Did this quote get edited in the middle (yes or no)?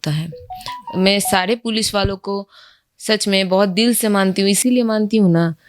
no